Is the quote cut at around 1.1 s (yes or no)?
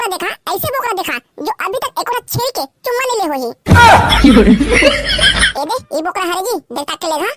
no